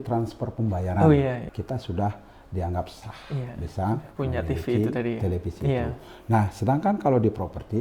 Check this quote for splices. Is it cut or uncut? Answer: cut